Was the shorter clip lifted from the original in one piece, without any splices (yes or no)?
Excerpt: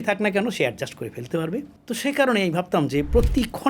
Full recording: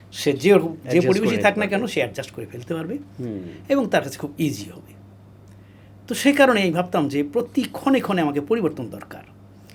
no